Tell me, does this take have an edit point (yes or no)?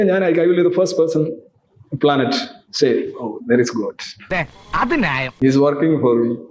no